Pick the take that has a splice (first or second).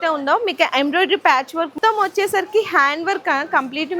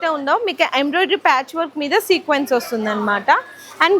first